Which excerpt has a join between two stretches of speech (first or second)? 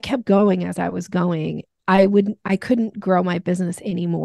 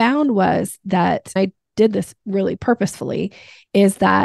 second